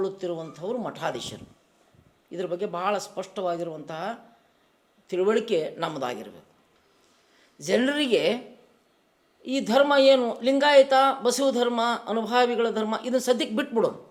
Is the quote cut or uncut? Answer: uncut